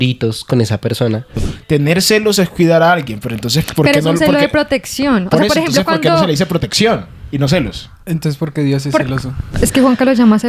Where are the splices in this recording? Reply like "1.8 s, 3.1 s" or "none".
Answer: 1.5 s, 9.5 s